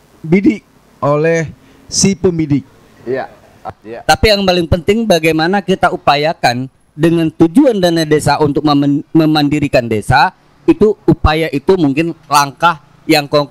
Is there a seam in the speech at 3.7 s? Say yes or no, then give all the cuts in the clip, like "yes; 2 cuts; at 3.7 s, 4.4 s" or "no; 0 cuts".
yes; 1 cut; at 3.7 s